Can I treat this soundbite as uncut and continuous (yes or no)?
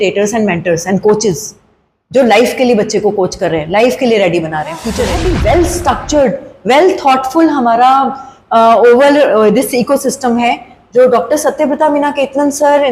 no